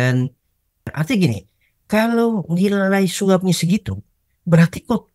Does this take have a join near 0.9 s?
yes; 1 cut; at 0.9 s

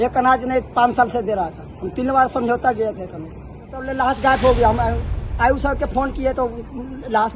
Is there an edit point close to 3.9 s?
yes; 1 cut; at 3.9 s

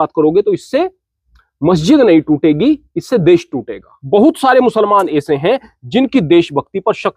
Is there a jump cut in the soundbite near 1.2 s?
no; 1 cut; at 3.9 s

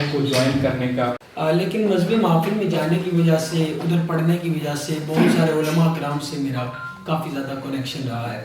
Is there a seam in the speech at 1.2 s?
yes; 1 cut; at 1.2 s

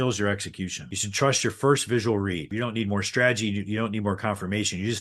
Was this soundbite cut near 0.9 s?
no; 1 cut; at 2.5 s

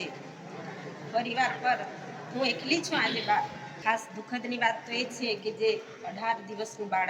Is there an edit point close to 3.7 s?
yes; 1 cut; at 3.7 s

